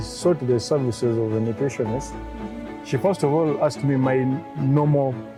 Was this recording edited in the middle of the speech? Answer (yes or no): no